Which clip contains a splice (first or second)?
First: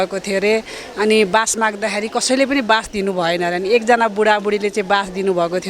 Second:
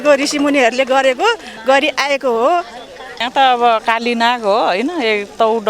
second